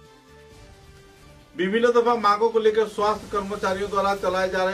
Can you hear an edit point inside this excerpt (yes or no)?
yes